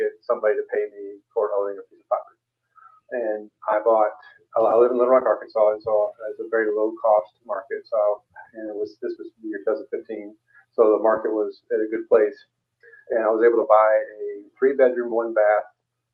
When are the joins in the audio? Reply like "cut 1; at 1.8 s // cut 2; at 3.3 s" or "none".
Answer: none